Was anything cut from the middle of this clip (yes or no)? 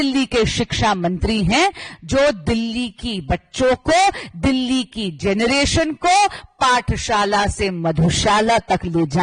no